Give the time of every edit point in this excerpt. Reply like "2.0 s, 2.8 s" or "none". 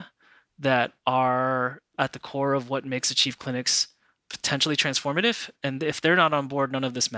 5.5 s